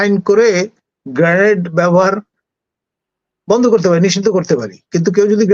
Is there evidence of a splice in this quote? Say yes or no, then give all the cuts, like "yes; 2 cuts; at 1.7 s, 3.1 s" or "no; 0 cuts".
no; 0 cuts